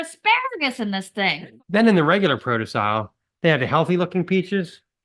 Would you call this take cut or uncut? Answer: cut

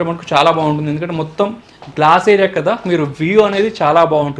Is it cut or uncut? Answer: uncut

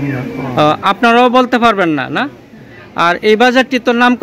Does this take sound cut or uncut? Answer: uncut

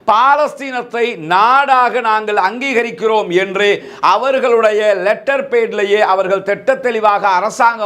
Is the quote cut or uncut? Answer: uncut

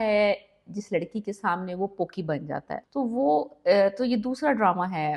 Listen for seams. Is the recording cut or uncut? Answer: cut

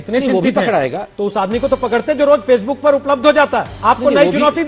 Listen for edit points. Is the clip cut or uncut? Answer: cut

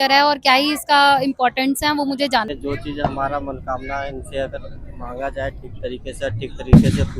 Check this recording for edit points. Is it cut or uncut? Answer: cut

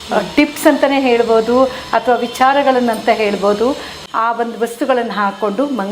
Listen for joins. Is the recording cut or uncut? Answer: cut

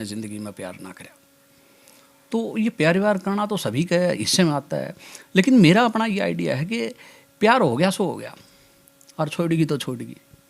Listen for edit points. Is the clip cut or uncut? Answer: uncut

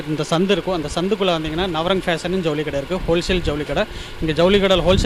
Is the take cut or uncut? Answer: uncut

